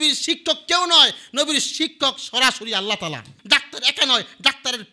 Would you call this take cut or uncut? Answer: cut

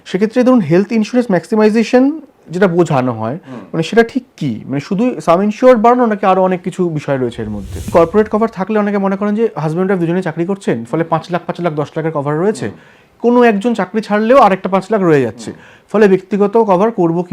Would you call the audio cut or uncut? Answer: cut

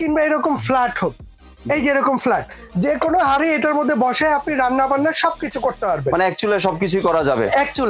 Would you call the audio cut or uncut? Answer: uncut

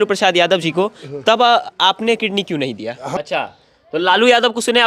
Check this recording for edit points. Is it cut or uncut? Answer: cut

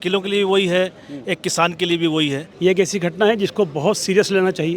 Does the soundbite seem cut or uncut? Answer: cut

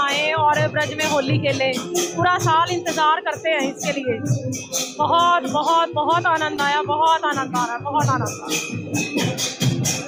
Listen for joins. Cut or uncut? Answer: uncut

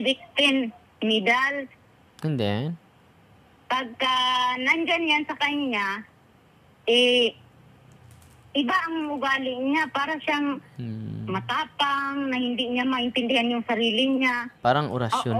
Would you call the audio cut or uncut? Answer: cut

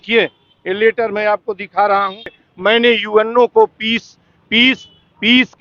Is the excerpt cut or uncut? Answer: cut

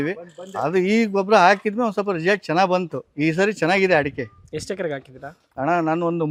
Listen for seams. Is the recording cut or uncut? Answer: uncut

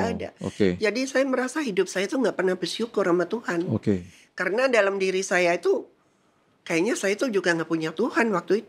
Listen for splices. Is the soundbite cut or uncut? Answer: uncut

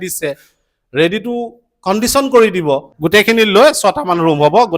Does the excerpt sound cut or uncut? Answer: cut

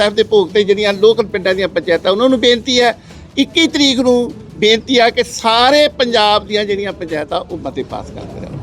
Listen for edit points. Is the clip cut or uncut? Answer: uncut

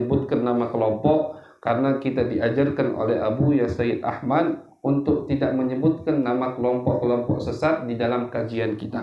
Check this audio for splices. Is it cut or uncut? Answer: uncut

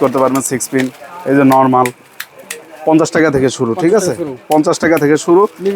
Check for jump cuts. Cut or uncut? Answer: uncut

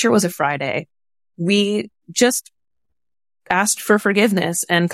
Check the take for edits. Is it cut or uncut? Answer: uncut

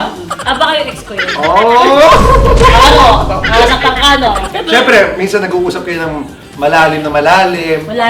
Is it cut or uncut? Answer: cut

